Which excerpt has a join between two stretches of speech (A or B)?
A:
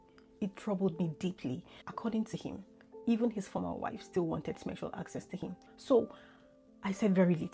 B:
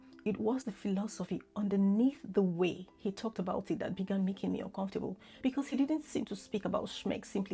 A